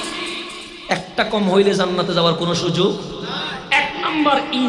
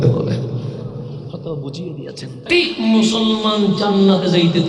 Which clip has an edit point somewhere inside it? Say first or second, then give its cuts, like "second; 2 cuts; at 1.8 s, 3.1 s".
second; 1 cut; at 2.3 s